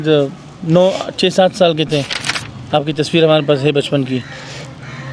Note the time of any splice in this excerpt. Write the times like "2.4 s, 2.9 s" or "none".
none